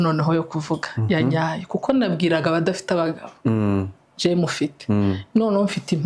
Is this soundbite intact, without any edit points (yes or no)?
yes